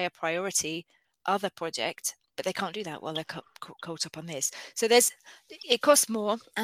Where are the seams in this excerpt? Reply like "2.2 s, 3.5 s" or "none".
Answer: none